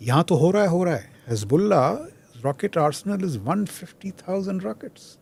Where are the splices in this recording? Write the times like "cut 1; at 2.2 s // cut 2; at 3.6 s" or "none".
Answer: none